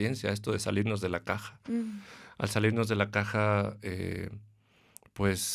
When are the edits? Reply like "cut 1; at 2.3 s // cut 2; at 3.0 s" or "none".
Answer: none